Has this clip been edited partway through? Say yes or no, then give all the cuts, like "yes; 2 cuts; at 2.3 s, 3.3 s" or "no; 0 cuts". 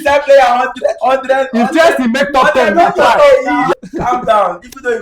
yes; 1 cut; at 3.7 s